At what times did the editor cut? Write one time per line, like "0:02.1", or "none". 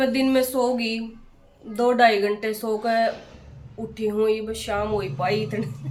none